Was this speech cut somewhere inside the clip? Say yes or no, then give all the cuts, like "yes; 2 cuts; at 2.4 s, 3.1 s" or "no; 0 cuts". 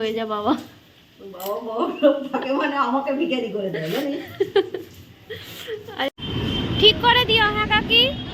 yes; 1 cut; at 6.1 s